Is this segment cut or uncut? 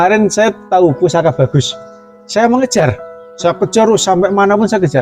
uncut